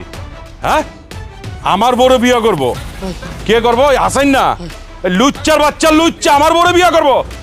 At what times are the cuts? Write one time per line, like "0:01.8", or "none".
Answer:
0:03.1